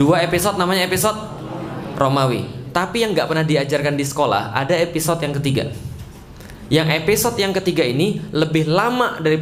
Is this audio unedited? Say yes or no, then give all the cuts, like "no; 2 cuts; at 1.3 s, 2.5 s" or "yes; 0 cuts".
yes; 0 cuts